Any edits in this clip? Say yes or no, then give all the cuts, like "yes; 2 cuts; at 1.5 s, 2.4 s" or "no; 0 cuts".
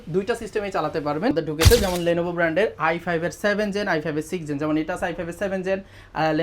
yes; 1 cut; at 1.3 s